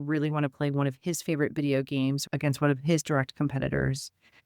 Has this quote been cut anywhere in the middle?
yes; 1 cut; at 2.2 s

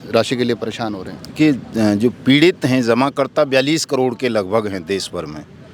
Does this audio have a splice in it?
no; 0 cuts

